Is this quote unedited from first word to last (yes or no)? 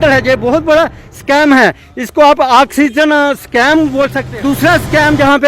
no